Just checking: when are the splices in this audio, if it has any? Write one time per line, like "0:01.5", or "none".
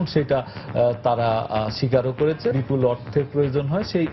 0:02.5